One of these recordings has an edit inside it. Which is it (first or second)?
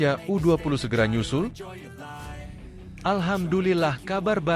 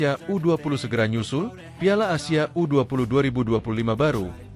first